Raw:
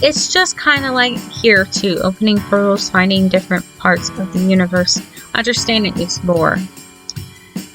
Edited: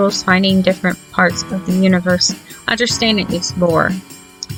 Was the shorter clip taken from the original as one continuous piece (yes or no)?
yes